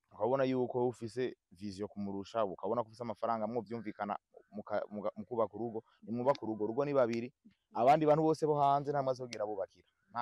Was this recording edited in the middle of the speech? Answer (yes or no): no